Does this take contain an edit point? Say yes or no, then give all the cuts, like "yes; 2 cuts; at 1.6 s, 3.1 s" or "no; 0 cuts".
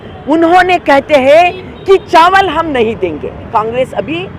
yes; 1 cut; at 3.5 s